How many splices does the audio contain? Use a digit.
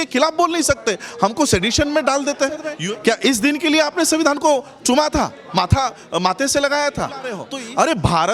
2